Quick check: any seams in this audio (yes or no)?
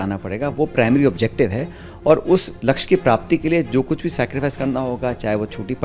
no